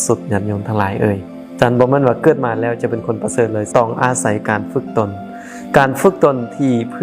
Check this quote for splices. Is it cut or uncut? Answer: cut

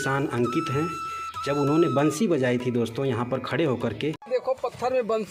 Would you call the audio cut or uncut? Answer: cut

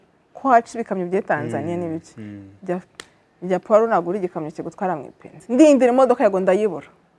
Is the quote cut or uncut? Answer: cut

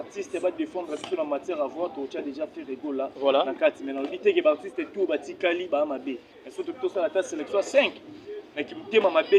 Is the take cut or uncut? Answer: uncut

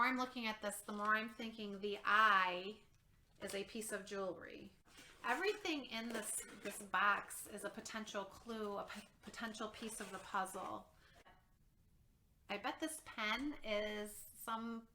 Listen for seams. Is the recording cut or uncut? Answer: cut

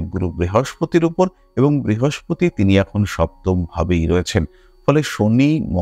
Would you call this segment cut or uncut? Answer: uncut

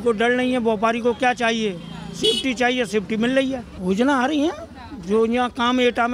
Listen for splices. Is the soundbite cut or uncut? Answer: cut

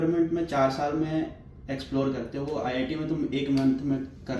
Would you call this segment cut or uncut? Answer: uncut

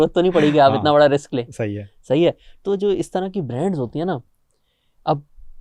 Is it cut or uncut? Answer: uncut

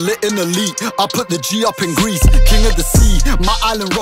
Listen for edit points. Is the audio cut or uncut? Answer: uncut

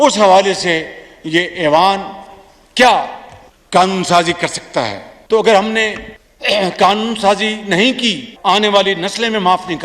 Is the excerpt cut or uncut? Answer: uncut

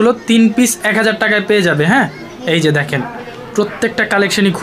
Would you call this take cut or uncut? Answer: uncut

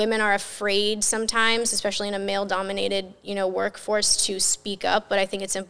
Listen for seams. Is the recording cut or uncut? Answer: uncut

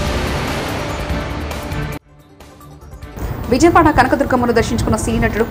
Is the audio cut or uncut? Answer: cut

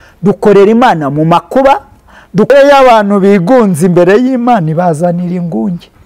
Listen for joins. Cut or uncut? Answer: cut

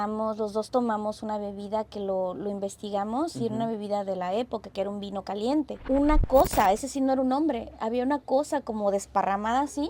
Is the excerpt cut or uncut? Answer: cut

